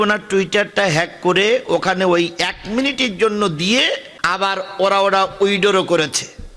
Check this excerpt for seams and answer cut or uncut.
uncut